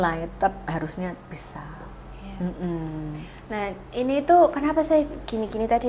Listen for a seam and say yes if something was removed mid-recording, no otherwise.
no